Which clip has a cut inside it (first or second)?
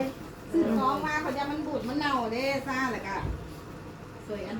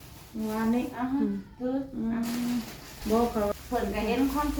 second